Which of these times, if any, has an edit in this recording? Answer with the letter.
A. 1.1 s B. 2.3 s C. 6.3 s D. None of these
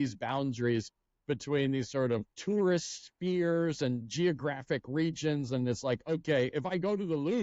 B